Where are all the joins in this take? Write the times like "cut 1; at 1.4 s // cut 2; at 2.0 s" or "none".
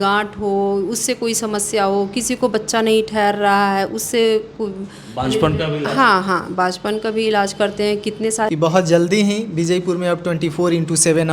cut 1; at 8.5 s